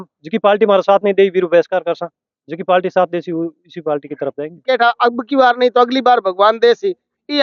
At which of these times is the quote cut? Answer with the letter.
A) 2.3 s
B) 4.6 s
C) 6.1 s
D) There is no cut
B